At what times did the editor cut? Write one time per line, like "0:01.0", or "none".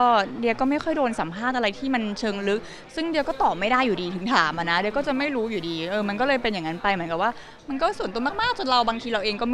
none